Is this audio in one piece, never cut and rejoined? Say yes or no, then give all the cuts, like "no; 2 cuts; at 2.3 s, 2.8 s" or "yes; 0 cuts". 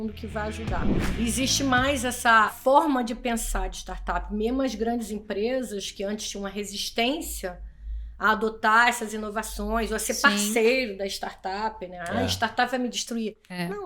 no; 1 cut; at 1.0 s